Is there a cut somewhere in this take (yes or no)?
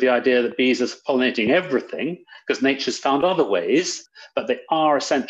yes